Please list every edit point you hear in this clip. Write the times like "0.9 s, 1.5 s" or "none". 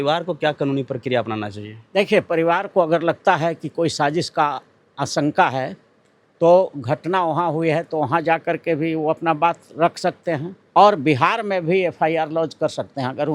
10.5 s